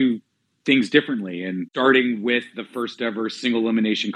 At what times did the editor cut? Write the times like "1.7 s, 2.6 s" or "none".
1.7 s